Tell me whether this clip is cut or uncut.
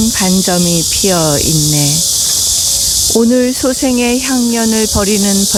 uncut